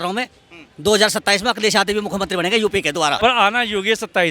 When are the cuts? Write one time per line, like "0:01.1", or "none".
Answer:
0:03.2

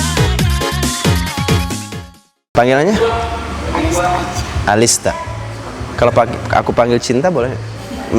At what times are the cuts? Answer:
0:02.5

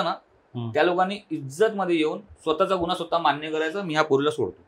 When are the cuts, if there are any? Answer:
none

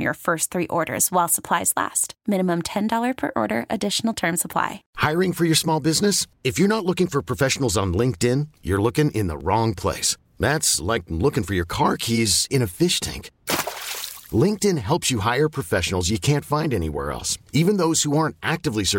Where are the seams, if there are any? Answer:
0:04.8

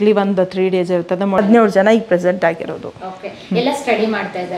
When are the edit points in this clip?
0:01.4

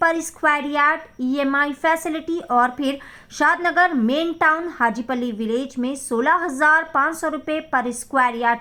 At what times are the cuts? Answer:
none

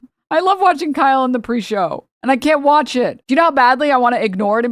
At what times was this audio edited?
0:02.1
0:03.2

